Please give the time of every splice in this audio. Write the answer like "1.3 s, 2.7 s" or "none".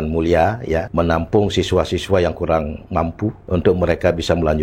0.9 s, 3.4 s